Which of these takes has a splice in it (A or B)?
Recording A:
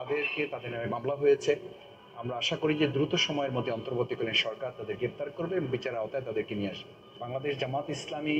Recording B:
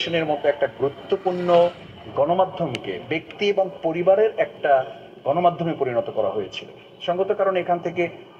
A